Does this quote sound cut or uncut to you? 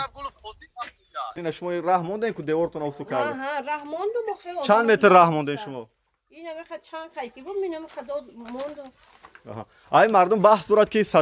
cut